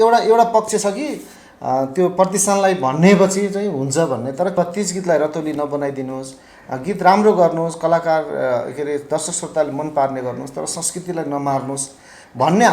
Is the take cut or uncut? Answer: cut